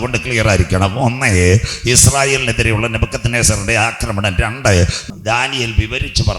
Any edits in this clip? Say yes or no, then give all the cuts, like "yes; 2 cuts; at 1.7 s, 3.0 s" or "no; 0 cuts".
yes; 1 cut; at 5.0 s